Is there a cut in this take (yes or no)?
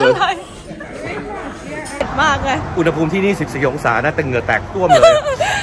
yes